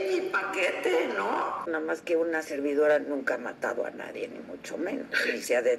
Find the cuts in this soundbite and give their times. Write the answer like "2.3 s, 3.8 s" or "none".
1.7 s